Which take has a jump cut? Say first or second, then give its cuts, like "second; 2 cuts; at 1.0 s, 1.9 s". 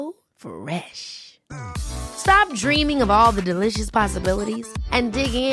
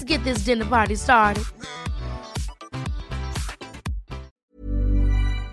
second; 1 cut; at 4.4 s